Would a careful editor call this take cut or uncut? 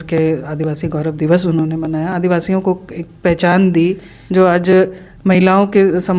cut